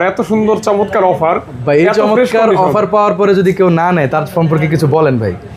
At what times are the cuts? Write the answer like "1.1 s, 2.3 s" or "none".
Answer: none